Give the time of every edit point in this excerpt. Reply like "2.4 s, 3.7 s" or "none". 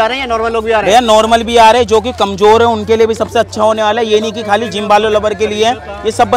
none